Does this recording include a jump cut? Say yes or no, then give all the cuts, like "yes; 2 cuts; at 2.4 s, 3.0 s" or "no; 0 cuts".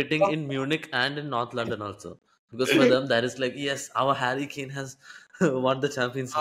no; 0 cuts